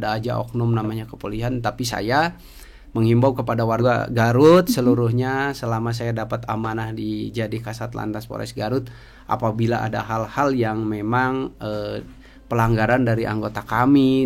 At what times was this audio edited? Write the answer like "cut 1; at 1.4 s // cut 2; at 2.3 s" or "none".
cut 1; at 3.8 s